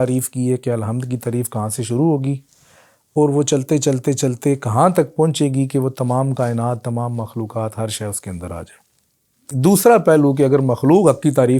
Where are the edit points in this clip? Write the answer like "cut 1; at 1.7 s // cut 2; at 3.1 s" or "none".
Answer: cut 1; at 9.5 s